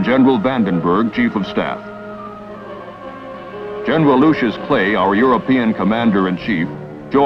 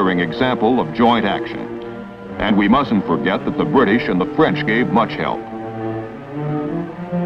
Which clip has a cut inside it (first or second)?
first